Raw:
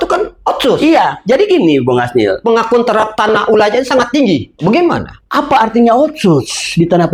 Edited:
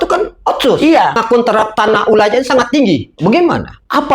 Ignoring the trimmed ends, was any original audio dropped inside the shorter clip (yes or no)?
yes